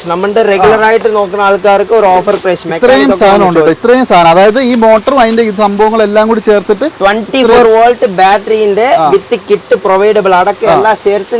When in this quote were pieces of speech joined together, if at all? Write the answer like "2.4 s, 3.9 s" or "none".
none

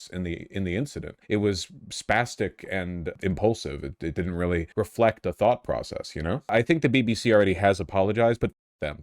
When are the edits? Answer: 1.1 s, 3.1 s, 4.7 s, 6.5 s

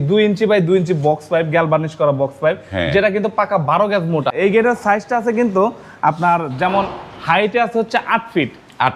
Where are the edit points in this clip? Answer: 4.4 s

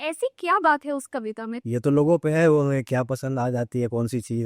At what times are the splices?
1.5 s

